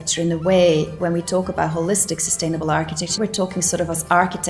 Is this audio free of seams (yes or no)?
no